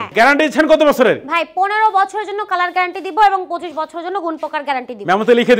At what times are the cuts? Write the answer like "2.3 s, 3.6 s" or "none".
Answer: none